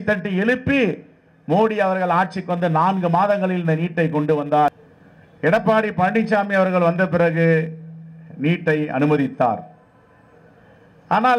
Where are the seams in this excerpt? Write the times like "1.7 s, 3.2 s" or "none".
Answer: 4.7 s